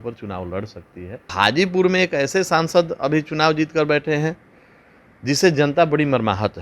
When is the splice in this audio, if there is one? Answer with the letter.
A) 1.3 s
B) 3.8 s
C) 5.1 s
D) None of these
A